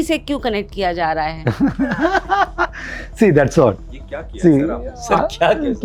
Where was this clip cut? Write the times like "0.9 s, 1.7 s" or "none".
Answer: none